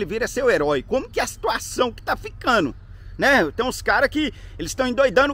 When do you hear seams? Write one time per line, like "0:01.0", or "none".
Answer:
none